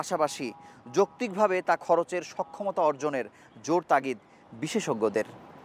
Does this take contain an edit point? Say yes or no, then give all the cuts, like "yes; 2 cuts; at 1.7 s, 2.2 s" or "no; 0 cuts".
no; 0 cuts